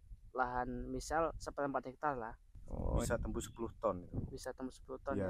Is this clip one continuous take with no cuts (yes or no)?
no